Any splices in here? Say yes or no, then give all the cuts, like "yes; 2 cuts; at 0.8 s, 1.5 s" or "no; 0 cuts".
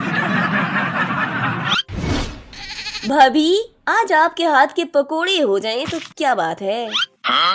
no; 0 cuts